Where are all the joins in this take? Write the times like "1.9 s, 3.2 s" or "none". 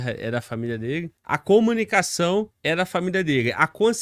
1.4 s, 2.6 s